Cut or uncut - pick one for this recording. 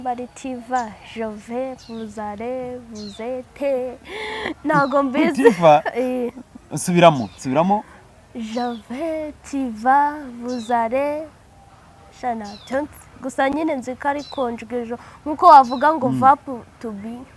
uncut